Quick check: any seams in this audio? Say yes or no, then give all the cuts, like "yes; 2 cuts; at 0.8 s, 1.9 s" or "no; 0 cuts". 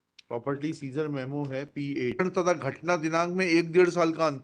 yes; 1 cut; at 2.2 s